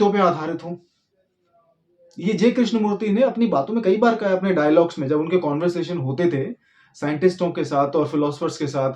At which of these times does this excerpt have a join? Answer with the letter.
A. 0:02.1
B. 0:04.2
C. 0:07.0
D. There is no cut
D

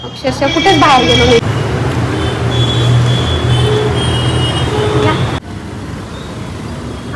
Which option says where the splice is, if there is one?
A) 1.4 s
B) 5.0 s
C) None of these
A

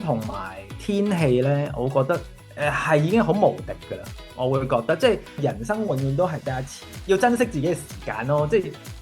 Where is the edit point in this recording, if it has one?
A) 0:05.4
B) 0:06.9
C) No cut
A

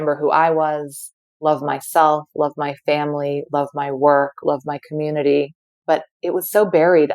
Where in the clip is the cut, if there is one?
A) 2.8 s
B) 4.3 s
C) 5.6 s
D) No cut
C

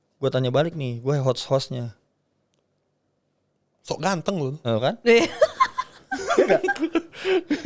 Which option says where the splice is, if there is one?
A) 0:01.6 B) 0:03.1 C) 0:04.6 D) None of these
D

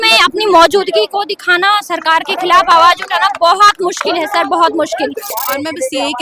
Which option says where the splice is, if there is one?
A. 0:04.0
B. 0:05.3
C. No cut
B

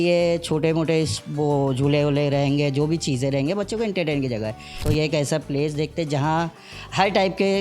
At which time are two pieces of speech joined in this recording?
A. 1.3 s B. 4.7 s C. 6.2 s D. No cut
B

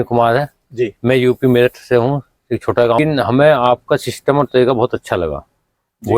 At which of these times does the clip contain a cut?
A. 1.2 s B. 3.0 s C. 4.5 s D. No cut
B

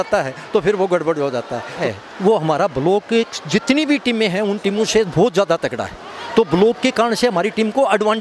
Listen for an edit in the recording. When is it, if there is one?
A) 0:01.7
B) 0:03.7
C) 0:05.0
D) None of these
A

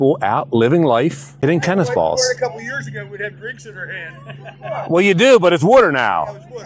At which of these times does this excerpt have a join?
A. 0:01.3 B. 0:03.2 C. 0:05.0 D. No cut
A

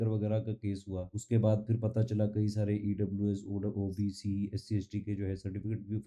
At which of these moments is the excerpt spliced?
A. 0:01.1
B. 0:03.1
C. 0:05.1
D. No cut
A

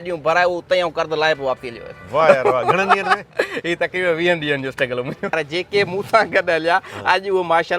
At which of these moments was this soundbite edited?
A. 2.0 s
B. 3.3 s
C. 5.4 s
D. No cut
C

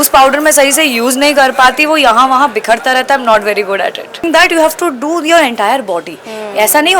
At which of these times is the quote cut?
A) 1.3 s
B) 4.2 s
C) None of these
B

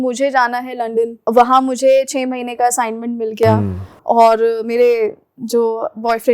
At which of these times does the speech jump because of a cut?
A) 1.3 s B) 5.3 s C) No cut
A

